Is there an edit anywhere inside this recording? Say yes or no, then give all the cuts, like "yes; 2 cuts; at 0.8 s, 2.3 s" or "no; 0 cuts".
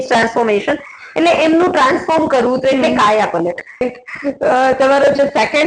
yes; 1 cut; at 3.8 s